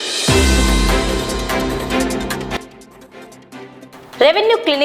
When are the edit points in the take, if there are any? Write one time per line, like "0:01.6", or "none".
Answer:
0:02.1